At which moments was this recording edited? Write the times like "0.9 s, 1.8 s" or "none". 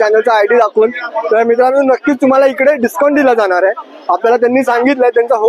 none